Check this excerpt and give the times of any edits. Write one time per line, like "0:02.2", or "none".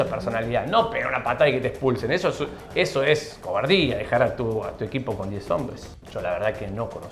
0:02.6
0:05.8